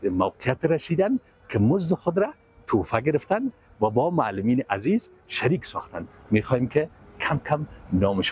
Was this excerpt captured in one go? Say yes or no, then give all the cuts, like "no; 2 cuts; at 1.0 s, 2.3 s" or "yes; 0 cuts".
yes; 0 cuts